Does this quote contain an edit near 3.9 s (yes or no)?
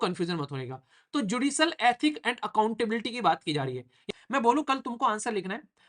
yes